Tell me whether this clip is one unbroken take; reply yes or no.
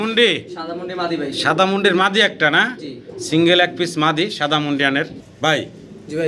yes